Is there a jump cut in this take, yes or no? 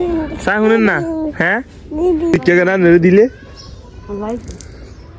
yes